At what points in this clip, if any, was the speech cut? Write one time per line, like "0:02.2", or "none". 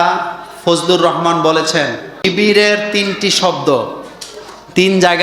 0:02.2